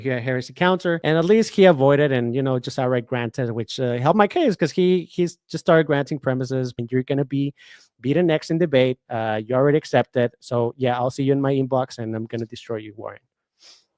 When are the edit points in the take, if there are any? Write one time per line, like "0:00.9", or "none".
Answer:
0:01.0
0:06.8